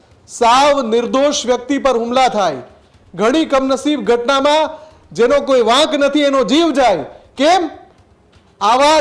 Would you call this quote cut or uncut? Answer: uncut